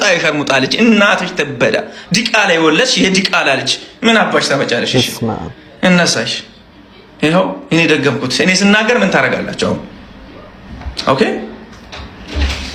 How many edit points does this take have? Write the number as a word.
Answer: zero